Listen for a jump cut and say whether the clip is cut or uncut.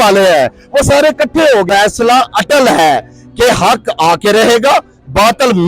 cut